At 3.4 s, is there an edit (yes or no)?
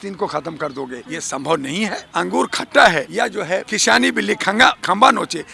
yes